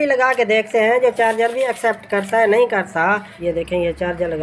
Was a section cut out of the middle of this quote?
yes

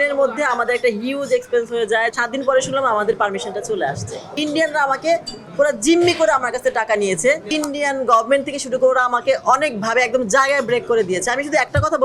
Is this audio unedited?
no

